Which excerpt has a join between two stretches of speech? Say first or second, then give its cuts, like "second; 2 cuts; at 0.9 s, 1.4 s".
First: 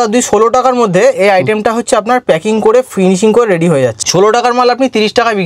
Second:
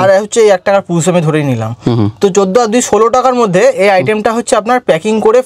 first; 1 cut; at 4.0 s